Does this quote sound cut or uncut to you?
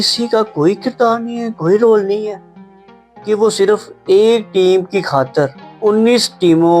cut